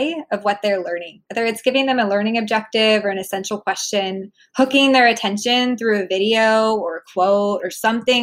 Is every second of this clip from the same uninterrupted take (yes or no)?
no